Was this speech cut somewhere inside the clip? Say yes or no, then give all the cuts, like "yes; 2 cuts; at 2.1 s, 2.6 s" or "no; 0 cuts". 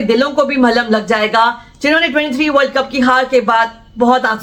no; 0 cuts